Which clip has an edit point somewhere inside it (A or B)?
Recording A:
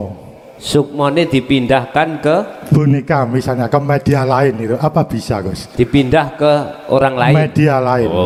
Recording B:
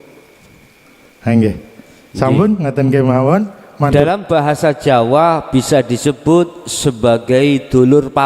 B